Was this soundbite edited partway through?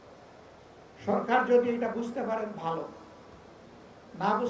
no; 0 cuts

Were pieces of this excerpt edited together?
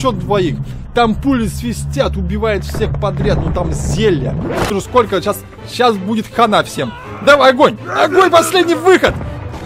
yes; 1 cut; at 4.7 s

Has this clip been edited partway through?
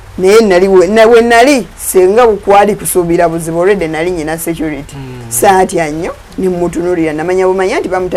no; 0 cuts

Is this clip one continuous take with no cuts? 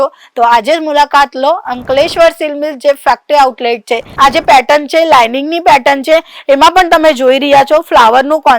no; 1 cut; at 4.0 s

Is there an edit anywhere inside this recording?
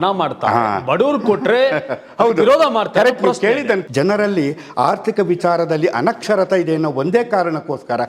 yes; 1 cut; at 3.8 s

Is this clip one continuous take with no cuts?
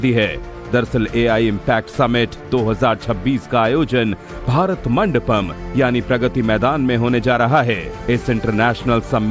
yes; 0 cuts

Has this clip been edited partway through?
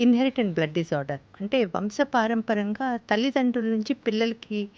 no; 0 cuts

